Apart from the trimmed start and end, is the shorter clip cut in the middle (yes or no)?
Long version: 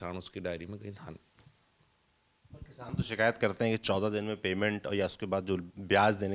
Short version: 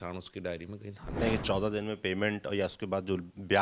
yes